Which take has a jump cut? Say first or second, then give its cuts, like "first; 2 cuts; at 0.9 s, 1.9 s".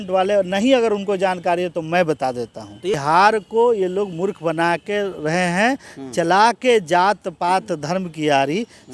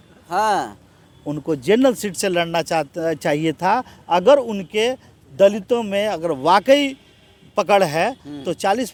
first; 1 cut; at 3.0 s